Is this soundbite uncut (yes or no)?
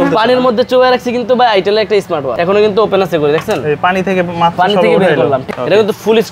no